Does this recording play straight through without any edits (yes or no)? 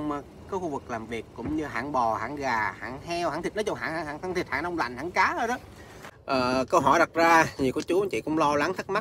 no